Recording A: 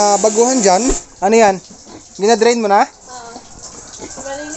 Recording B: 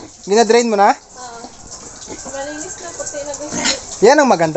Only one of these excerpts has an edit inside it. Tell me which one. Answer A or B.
A